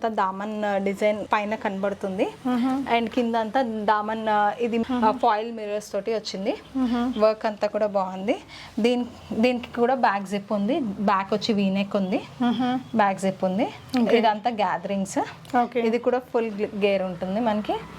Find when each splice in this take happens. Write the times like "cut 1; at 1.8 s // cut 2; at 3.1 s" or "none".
none